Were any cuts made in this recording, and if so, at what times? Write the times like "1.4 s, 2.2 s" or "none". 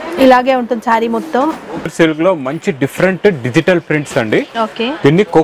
1.9 s